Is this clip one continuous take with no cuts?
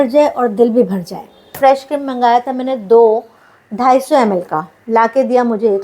no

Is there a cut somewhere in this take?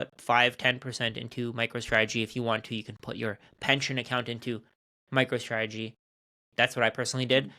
no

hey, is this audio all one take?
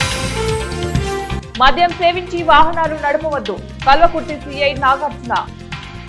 no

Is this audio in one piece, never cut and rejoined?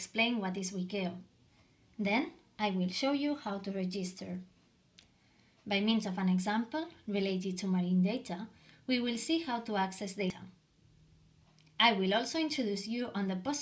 no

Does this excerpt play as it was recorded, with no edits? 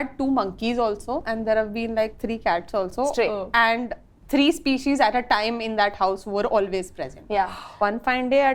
no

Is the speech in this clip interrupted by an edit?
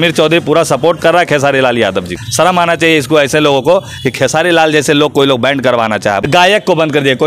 yes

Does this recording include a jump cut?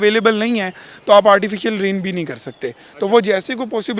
no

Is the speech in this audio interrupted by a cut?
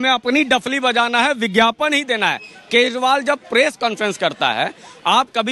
no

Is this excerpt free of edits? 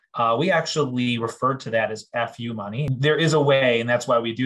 no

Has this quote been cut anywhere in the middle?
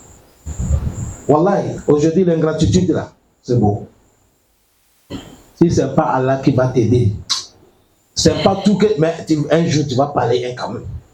no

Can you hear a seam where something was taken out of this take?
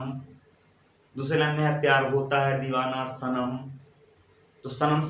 no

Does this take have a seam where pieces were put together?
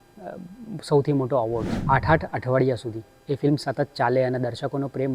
yes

